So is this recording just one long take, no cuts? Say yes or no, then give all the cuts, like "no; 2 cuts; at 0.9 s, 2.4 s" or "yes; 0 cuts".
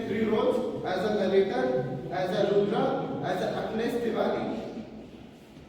yes; 0 cuts